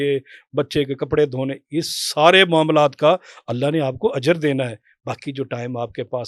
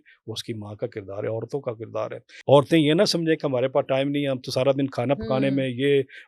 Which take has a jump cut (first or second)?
second